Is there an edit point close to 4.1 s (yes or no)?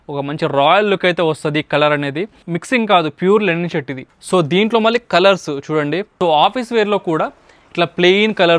yes